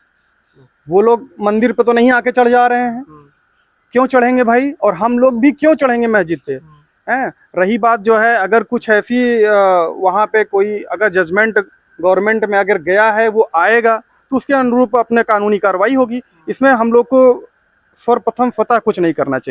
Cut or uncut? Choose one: uncut